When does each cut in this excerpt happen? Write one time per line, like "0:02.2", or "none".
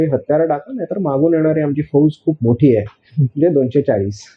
none